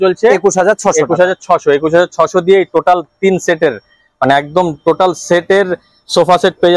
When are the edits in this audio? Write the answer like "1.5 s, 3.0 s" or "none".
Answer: none